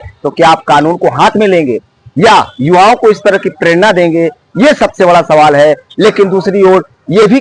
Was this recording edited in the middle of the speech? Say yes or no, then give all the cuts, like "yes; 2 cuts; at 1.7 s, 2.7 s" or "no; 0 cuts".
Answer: no; 0 cuts